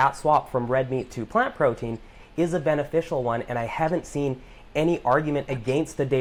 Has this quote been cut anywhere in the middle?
no; 0 cuts

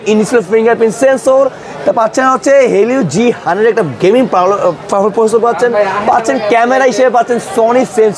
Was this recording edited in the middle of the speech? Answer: no; 0 cuts

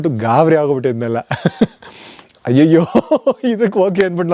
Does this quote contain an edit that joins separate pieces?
no; 0 cuts

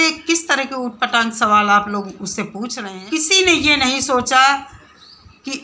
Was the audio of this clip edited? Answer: yes; 1 cut; at 2.9 s

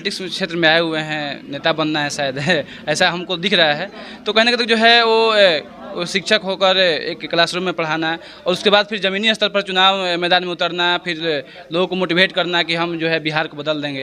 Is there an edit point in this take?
no; 0 cuts

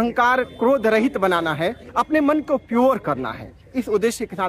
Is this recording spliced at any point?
no; 0 cuts

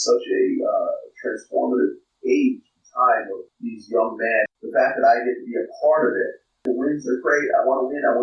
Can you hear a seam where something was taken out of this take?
yes; 4 cuts; at 2.1 s, 3.4 s, 4.5 s, 6.6 s

